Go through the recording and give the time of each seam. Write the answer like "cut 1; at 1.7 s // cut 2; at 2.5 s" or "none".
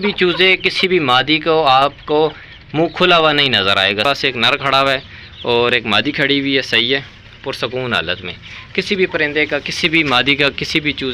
cut 1; at 4.0 s

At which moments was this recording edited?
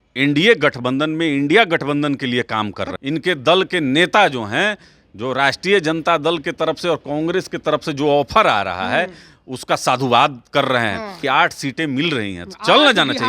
cut 1; at 2.9 s // cut 2; at 11.2 s

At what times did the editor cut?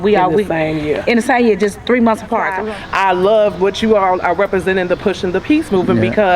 cut 1; at 2.6 s

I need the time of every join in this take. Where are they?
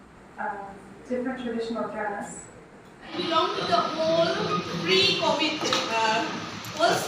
cut 1; at 3.1 s

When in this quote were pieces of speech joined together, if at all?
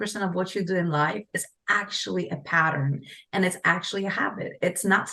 none

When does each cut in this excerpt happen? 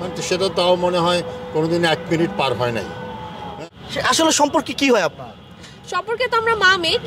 cut 1; at 3.6 s

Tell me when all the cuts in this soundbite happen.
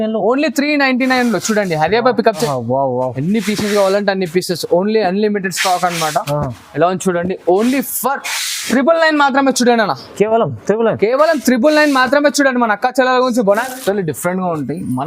cut 1; at 2.5 s // cut 2; at 13.6 s

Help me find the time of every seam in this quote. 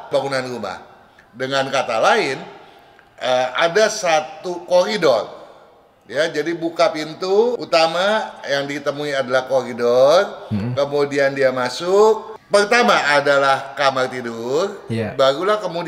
cut 1; at 7.6 s // cut 2; at 12.3 s

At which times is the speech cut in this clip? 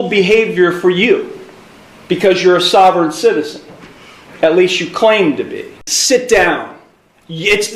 cut 1; at 5.9 s

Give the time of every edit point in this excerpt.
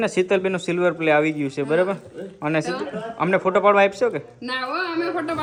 none

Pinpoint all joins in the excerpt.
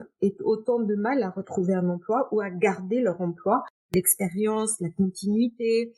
cut 1; at 3.9 s

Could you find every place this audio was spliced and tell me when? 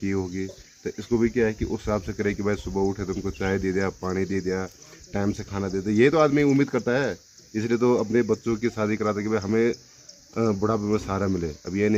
none

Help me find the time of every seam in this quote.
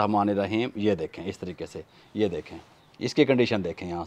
none

